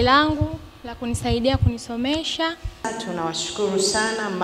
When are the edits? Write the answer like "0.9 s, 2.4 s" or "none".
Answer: 2.9 s